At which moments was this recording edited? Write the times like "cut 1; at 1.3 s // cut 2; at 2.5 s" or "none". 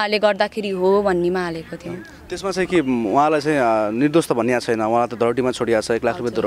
none